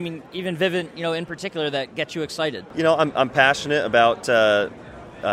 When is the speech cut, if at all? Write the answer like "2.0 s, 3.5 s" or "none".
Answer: 2.6 s